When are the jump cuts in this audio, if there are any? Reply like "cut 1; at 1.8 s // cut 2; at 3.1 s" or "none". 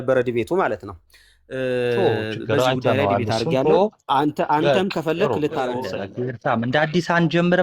cut 1; at 5.9 s